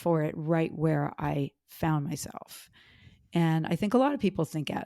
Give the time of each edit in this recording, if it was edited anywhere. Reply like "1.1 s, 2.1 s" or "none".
none